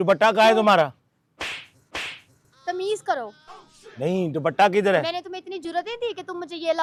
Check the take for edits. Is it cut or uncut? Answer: uncut